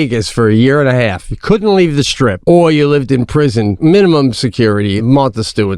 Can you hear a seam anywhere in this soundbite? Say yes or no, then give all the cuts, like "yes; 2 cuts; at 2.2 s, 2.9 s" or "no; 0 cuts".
yes; 3 cuts; at 2.4 s, 3.7 s, 5.0 s